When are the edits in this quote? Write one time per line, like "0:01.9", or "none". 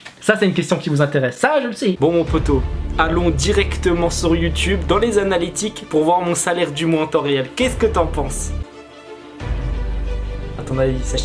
0:02.0
0:08.6